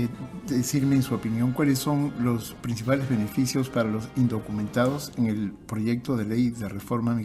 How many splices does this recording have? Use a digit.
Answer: 0